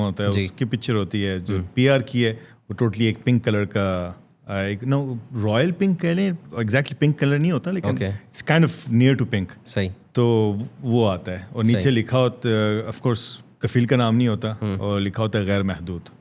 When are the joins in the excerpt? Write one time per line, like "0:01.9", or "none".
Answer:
none